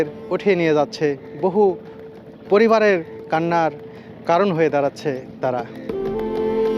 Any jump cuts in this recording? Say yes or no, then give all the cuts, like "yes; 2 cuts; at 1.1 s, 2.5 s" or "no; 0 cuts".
yes; 1 cut; at 5.8 s